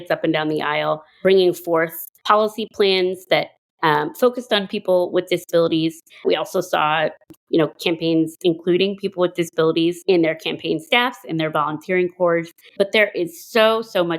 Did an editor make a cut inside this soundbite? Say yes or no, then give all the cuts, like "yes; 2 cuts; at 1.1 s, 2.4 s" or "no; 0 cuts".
yes; 3 cuts; at 1.2 s, 10.0 s, 12.7 s